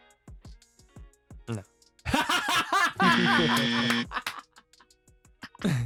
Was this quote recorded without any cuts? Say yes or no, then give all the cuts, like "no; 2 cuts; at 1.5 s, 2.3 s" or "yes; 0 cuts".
yes; 0 cuts